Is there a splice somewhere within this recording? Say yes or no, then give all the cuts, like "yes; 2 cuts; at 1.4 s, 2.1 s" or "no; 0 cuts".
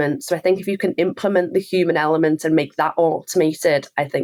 no; 0 cuts